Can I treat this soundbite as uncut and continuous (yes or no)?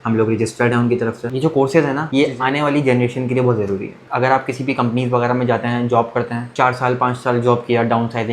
no